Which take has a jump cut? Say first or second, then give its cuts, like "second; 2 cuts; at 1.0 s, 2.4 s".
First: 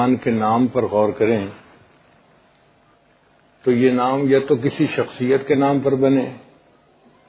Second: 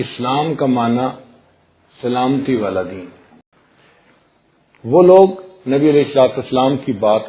second; 1 cut; at 3.5 s